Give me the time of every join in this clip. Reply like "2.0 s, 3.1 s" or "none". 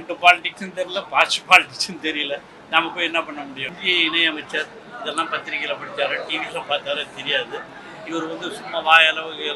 3.7 s